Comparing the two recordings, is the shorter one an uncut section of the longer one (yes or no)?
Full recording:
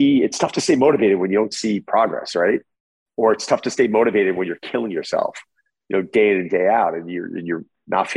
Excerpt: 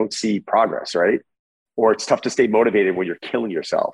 yes